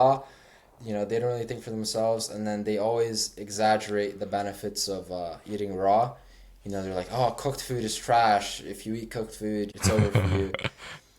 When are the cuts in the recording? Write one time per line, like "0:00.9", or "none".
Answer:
0:09.7